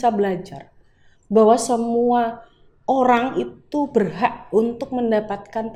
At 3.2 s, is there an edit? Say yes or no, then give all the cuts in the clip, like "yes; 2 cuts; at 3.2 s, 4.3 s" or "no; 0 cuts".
no; 0 cuts